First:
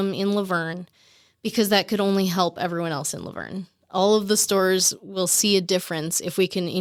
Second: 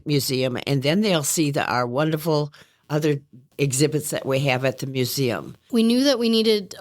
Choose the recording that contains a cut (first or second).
second